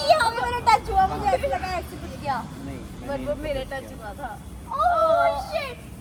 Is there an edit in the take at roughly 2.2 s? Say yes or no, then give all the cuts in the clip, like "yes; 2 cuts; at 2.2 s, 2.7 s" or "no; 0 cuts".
no; 0 cuts